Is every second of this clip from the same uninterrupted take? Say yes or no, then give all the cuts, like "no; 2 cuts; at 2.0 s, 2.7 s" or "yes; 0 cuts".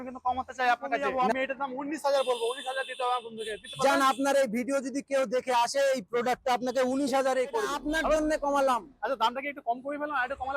no; 2 cuts; at 1.1 s, 8.2 s